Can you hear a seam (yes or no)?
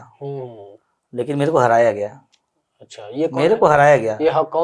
no